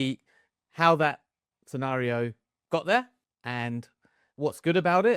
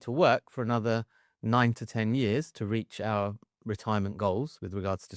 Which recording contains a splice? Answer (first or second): first